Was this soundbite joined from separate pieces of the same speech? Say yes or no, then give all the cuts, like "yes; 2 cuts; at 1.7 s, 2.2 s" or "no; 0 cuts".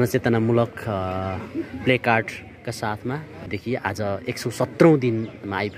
yes; 1 cut; at 3.5 s